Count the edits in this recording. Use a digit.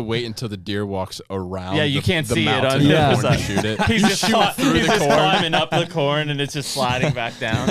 0